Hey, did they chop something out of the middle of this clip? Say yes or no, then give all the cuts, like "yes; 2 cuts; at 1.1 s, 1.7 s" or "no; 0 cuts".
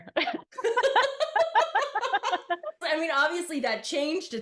no; 0 cuts